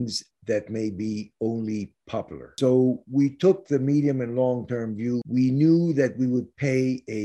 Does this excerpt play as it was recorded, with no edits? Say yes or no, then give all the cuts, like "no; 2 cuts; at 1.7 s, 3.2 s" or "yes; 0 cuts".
no; 2 cuts; at 2.5 s, 5.2 s